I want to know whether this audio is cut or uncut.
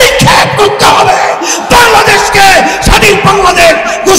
uncut